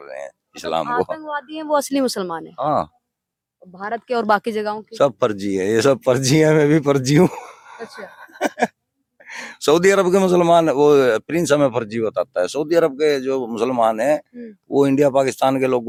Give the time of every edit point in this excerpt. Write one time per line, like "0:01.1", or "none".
none